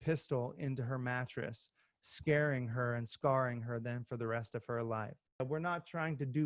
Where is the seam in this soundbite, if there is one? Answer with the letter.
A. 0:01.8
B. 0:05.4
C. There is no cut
B